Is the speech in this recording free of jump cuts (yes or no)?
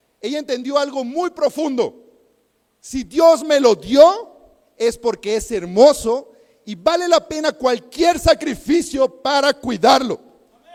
yes